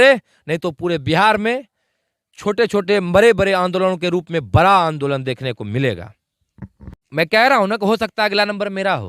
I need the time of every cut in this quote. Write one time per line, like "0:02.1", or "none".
0:06.8

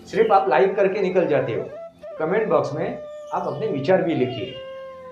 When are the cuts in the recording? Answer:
0:02.1

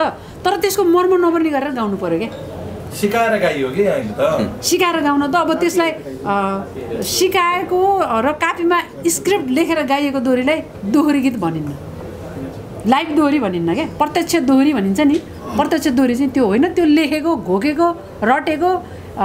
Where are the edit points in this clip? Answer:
none

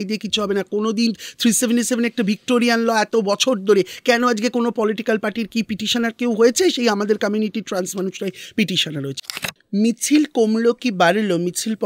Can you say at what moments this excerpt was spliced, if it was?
0:09.3

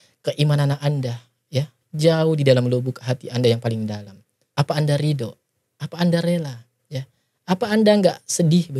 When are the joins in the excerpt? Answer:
none

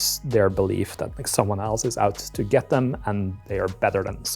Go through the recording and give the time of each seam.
0:03.3

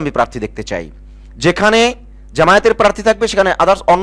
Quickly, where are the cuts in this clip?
none

